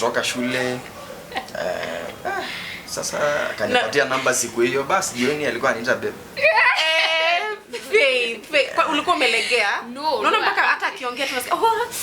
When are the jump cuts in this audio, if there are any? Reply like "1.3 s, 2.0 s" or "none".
none